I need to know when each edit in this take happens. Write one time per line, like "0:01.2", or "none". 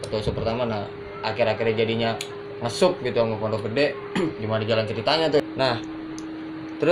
0:05.4